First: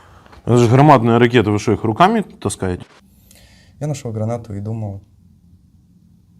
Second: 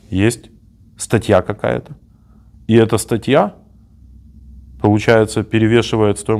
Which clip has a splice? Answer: first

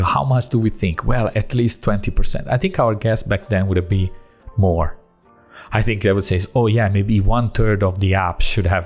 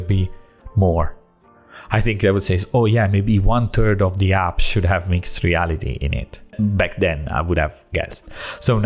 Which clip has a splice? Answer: second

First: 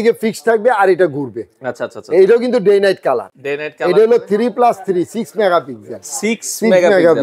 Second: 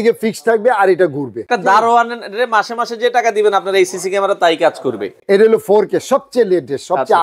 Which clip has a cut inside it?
second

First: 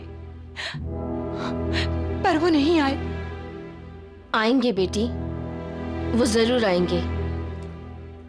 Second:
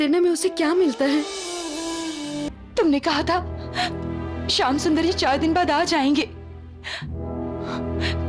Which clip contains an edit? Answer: second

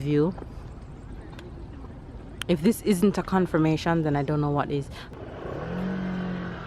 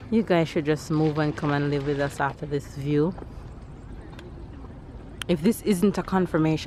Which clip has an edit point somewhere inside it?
first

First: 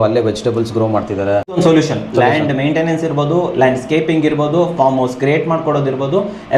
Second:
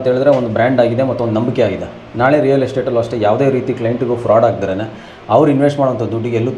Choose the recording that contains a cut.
first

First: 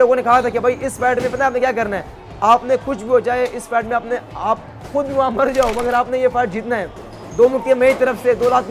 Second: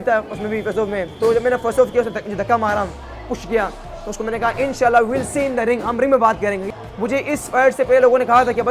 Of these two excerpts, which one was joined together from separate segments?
second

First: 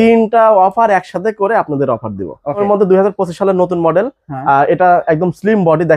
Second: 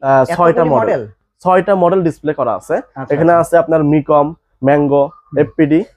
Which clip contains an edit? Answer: first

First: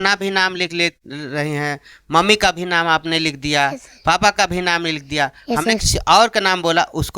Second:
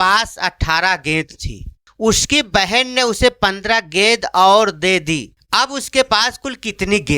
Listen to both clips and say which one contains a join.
second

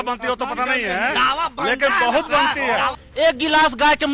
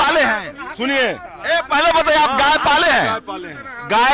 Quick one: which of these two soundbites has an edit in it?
first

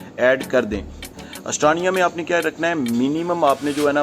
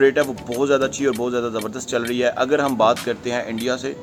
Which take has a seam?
first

